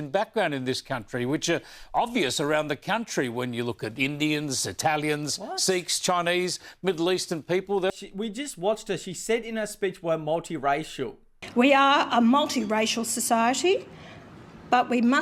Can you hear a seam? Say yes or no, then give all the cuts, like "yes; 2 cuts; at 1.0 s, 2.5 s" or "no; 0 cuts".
no; 0 cuts